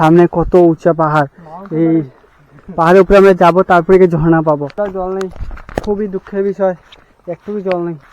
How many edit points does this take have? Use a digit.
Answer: 1